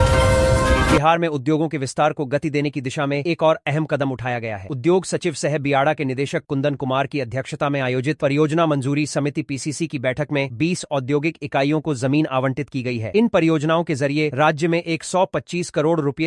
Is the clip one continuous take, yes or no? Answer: no